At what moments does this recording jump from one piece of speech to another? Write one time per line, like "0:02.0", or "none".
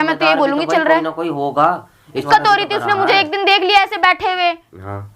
0:02.2